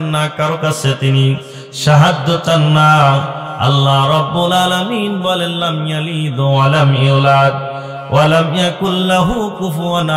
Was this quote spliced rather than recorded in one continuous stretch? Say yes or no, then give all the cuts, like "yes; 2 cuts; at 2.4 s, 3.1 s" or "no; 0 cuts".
no; 0 cuts